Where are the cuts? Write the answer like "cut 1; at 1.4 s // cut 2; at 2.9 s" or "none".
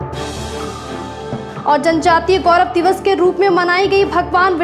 cut 1; at 1.2 s